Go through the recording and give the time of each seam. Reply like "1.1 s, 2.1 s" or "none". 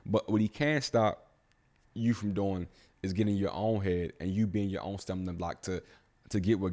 none